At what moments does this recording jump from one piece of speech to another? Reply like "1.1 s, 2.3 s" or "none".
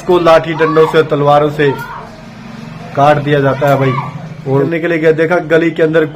4.7 s